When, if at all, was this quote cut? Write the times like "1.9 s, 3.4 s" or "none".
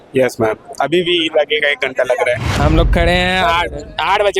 2.5 s